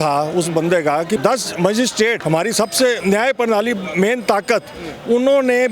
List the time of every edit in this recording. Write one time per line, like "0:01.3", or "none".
0:01.2
0:02.2
0:03.0